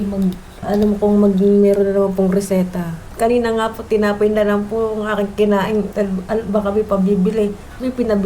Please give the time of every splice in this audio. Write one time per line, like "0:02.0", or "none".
0:03.0
0:05.9